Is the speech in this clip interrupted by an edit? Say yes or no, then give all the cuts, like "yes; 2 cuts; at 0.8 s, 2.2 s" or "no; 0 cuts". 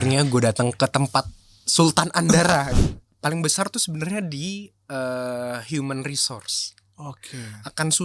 yes; 1 cut; at 2.7 s